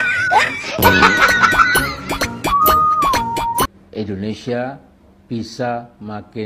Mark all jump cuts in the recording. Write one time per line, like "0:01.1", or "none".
0:03.7